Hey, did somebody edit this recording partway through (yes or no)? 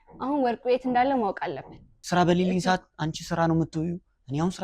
yes